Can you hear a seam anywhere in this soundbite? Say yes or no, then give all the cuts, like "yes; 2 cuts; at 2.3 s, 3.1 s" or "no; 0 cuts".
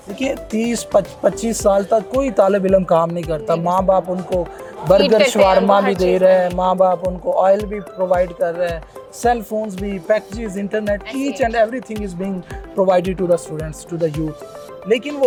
no; 0 cuts